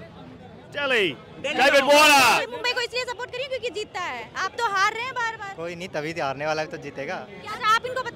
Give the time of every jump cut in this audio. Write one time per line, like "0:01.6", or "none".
0:02.5
0:07.3